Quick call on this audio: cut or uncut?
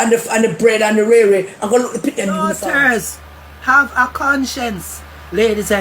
cut